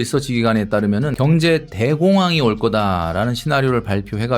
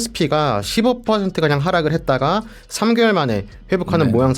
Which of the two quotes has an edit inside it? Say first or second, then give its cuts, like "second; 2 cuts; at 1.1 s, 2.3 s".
first; 1 cut; at 1.1 s